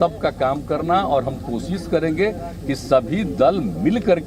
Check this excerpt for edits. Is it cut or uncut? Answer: uncut